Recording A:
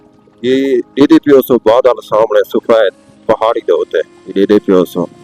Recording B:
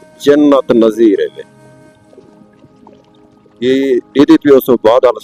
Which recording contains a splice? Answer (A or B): A